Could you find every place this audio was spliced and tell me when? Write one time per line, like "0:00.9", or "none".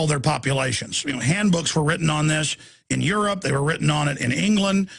0:01.8